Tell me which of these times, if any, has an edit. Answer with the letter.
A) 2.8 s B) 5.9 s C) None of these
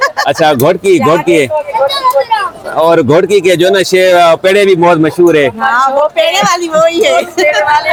C